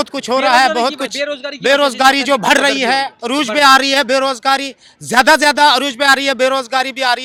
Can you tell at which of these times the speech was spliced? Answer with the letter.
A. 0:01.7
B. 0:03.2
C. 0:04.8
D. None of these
D